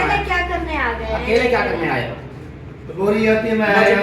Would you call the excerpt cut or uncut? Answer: cut